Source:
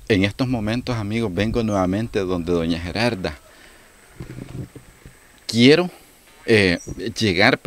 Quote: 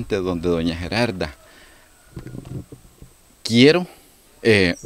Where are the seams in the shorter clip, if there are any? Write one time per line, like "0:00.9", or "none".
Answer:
none